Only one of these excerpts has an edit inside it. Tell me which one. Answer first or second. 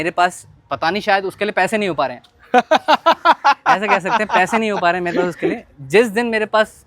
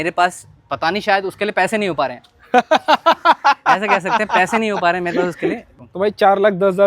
second